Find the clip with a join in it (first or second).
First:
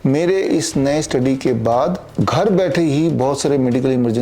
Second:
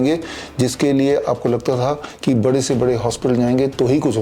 first